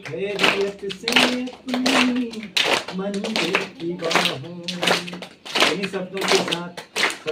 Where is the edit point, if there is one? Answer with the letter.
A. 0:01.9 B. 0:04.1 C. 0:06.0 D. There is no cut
D